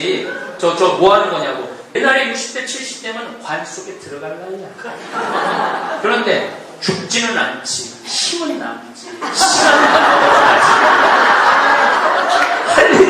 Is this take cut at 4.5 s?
no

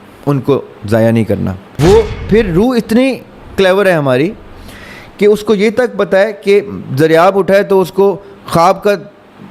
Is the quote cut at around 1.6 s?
yes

